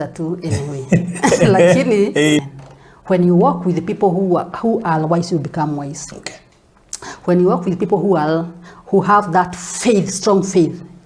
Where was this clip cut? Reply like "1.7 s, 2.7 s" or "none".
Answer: 2.4 s